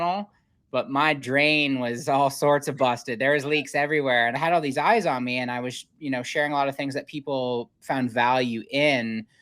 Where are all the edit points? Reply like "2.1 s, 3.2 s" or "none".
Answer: 4.4 s